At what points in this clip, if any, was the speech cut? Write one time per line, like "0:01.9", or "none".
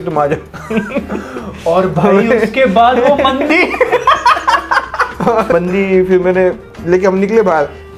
0:05.5